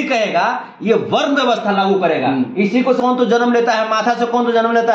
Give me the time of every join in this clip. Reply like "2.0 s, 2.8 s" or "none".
3.0 s